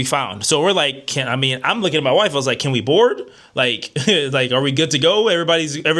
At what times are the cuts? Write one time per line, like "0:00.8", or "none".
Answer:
none